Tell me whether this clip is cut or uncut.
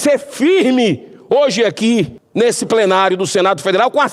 cut